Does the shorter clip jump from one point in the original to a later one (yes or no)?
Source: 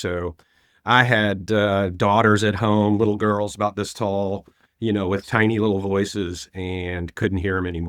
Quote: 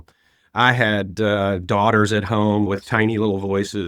yes